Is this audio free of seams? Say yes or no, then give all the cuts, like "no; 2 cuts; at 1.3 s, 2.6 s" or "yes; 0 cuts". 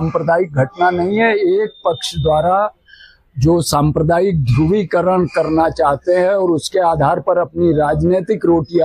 yes; 0 cuts